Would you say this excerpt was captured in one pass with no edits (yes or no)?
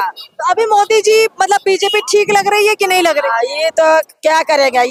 yes